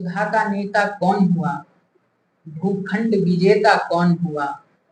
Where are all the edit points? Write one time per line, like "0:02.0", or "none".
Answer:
none

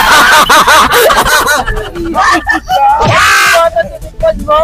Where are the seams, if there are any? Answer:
none

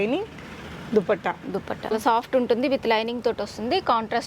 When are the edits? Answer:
0:01.9

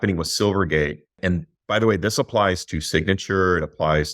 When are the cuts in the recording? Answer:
0:01.2

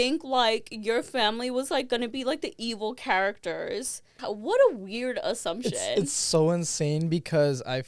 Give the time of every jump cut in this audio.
0:04.2

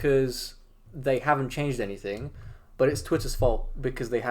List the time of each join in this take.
none

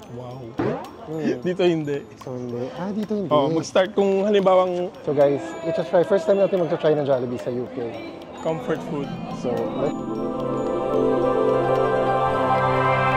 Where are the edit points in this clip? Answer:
0:05.0
0:09.9

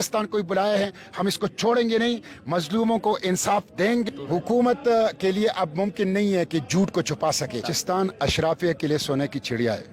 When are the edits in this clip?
0:04.1
0:07.7

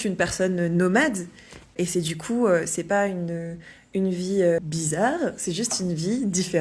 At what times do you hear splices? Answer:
0:01.6
0:04.6

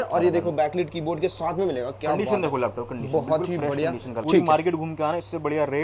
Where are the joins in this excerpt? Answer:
0:04.1

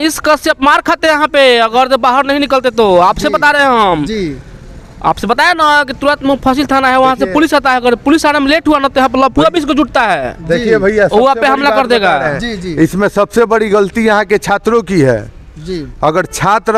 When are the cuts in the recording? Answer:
none

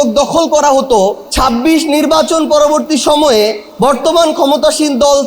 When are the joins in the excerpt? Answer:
0:01.2
0:03.6

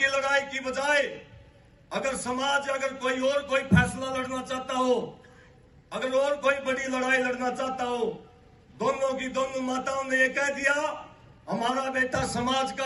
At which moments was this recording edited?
none

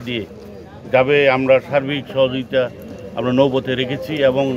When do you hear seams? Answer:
none

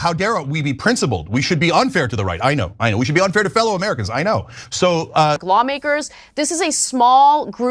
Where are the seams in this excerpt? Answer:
0:05.4

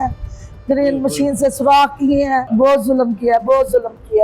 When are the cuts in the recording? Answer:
0:02.5

